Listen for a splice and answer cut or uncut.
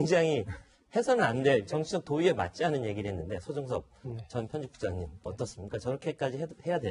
uncut